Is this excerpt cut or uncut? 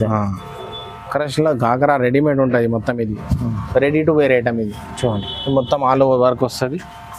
uncut